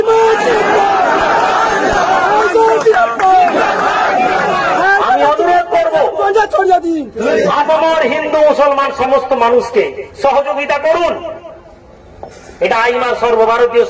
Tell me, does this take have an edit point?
no; 0 cuts

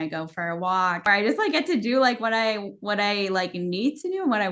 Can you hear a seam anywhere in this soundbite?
yes; 1 cut; at 1.0 s

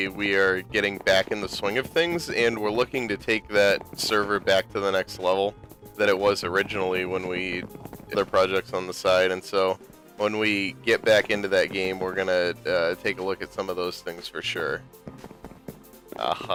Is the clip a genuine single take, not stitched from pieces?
yes; 0 cuts

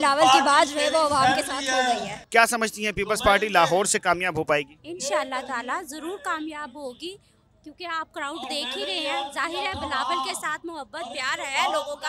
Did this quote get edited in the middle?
no; 0 cuts

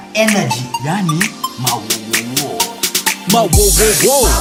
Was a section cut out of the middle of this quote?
no; 0 cuts

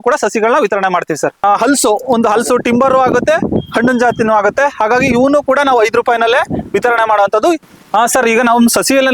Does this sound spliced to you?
yes; 2 cuts; at 1.4 s, 7.7 s

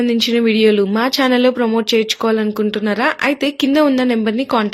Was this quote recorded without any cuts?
yes; 0 cuts

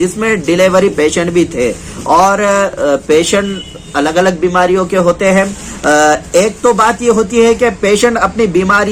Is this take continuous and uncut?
yes; 0 cuts

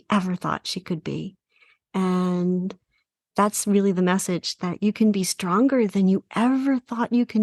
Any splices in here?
no; 0 cuts

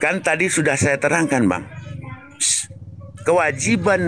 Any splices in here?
no; 0 cuts

